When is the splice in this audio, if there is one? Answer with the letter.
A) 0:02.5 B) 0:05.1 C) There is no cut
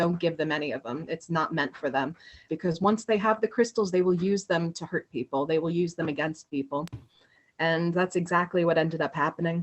A